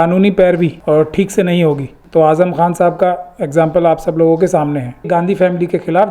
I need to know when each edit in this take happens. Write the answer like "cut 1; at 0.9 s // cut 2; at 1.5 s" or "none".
cut 1; at 0.8 s // cut 2; at 1.9 s // cut 3; at 5.0 s